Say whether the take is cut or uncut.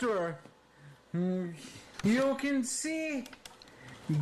cut